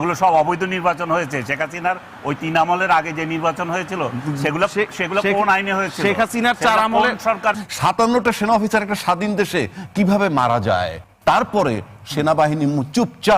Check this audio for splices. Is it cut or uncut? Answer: cut